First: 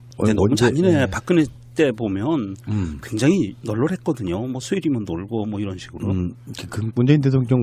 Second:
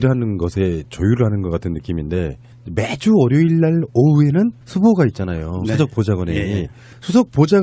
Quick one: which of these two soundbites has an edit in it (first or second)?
second